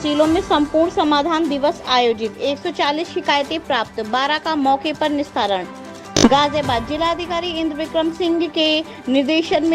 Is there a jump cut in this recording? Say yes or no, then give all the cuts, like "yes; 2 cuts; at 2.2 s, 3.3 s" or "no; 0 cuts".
no; 0 cuts